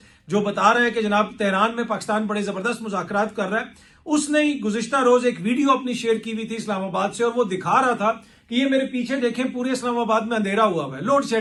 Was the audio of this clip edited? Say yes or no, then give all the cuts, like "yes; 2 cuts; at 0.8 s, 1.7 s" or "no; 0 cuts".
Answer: no; 0 cuts